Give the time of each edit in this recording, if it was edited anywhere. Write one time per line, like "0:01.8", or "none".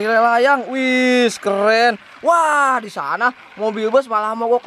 none

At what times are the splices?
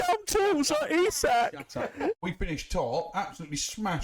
0:02.2

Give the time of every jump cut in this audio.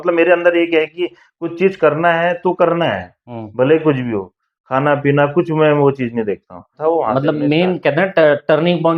0:06.7

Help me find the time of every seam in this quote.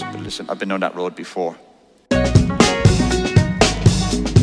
0:02.0

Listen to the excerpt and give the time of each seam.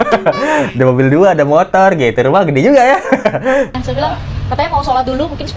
0:03.7

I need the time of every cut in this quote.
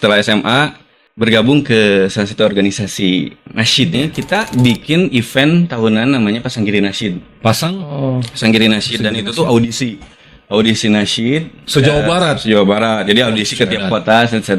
0:04.0

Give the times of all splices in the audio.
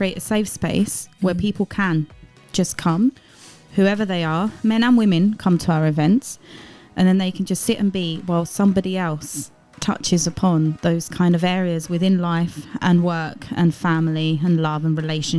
none

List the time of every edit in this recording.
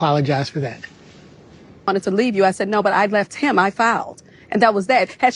0:01.9

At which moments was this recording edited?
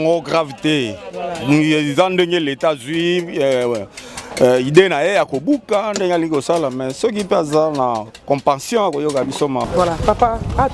0:09.6

